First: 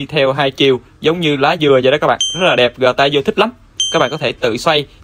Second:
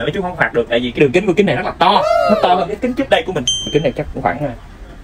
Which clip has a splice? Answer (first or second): second